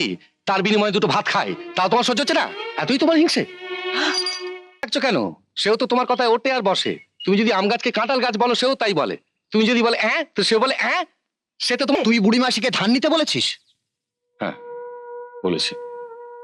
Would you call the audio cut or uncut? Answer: cut